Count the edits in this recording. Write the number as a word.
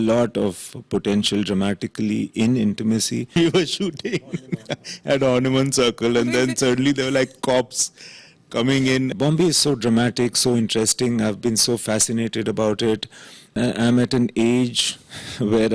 three